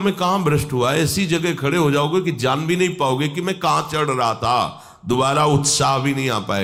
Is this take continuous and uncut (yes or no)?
yes